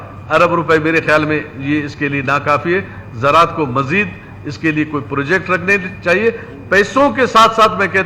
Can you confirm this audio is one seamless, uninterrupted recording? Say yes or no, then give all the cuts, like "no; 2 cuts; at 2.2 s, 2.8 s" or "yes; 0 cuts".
yes; 0 cuts